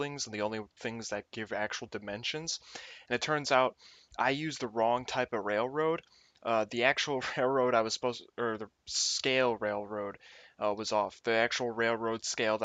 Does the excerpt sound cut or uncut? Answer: uncut